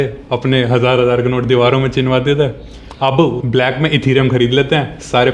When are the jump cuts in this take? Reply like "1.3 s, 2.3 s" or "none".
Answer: 3.4 s